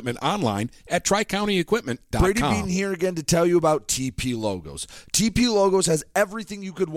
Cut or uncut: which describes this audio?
cut